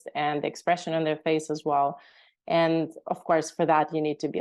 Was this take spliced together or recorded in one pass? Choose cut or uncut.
uncut